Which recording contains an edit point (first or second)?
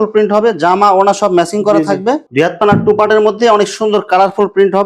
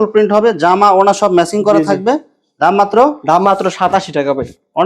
first